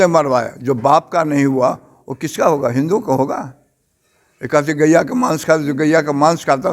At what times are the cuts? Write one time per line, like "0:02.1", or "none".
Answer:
none